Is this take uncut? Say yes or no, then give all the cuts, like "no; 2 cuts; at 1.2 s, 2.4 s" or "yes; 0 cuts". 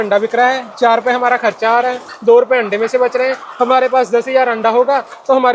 yes; 0 cuts